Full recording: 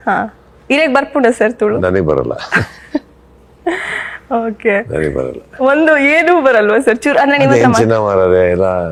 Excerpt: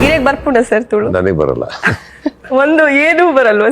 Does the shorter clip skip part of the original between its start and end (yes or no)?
yes